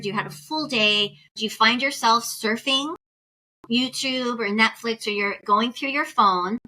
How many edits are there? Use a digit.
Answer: 1